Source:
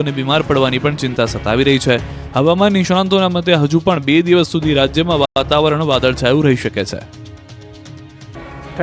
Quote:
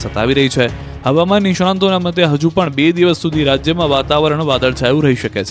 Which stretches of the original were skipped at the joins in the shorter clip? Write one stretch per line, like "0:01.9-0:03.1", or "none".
0:05.3-0:05.4